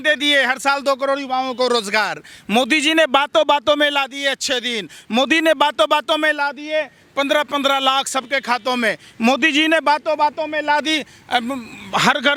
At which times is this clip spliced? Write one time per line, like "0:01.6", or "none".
none